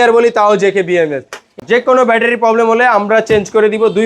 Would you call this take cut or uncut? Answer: cut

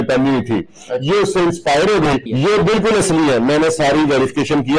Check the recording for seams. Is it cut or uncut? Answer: cut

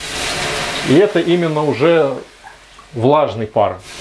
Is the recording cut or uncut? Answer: uncut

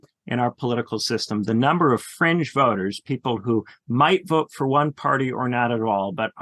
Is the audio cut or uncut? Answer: cut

